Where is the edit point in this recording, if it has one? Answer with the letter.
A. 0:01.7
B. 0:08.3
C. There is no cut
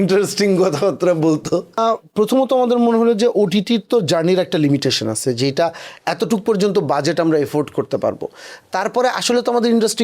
A